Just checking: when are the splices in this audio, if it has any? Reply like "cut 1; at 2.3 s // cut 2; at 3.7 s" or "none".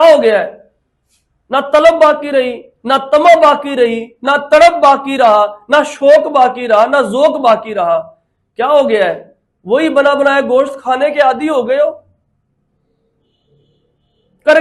none

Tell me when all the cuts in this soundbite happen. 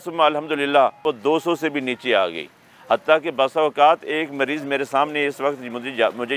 cut 1; at 1.0 s

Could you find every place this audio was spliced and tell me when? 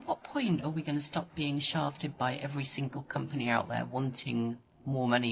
none

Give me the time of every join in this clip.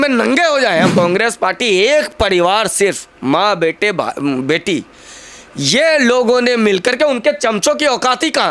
cut 1; at 0.9 s

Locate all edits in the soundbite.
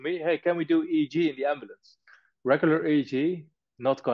cut 1; at 2.3 s

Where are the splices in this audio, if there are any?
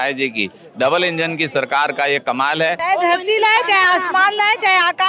cut 1; at 2.8 s

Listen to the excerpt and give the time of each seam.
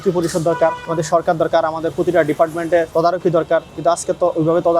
cut 1; at 0.8 s // cut 2; at 2.9 s // cut 3; at 3.7 s

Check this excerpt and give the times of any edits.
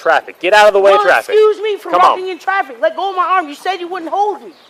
none

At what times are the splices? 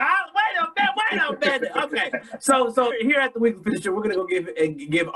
cut 1; at 2.9 s

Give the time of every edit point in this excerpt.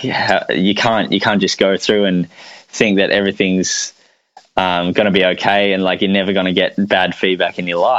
none

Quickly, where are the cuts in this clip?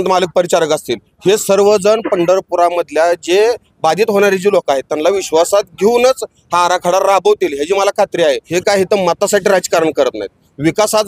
cut 1; at 8.4 s

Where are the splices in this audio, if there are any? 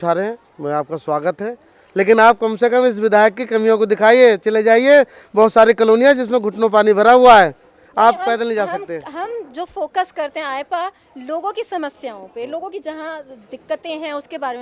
none

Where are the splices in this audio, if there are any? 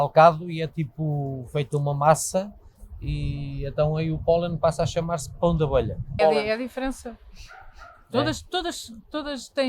cut 1; at 6.1 s

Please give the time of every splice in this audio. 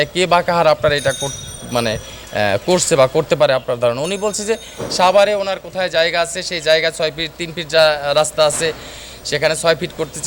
none

